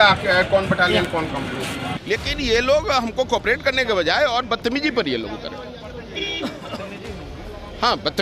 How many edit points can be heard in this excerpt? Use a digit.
1